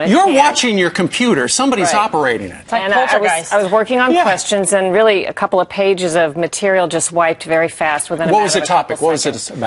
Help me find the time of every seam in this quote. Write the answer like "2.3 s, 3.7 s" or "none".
1.1 s